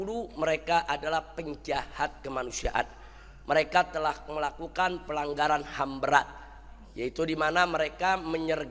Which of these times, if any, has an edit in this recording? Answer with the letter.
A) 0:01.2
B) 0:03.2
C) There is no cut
C